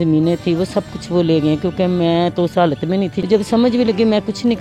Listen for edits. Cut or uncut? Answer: cut